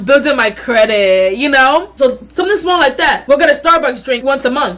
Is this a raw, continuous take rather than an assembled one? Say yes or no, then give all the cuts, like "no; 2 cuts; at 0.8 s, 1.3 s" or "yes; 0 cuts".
yes; 0 cuts